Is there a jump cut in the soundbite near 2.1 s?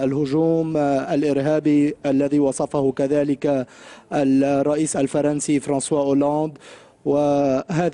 yes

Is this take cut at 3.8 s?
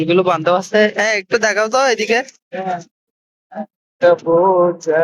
yes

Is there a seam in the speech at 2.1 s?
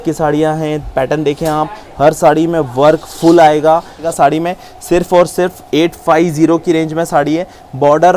no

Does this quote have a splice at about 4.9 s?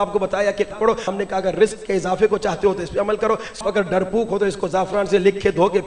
no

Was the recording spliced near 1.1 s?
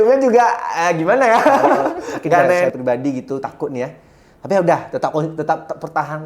no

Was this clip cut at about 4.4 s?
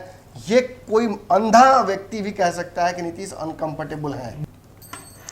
yes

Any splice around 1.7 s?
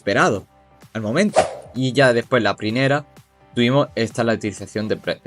yes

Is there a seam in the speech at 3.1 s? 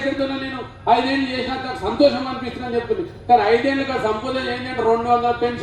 no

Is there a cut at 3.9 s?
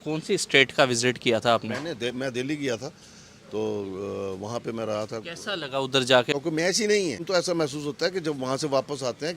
no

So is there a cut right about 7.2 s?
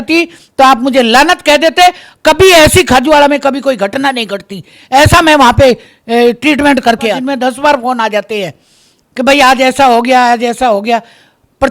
yes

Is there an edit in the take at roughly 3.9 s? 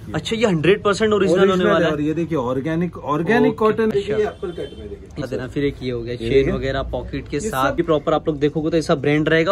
yes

